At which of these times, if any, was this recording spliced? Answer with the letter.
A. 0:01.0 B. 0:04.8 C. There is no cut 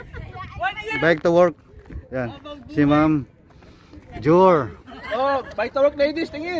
A